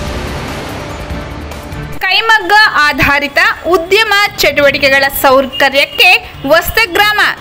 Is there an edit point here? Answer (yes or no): no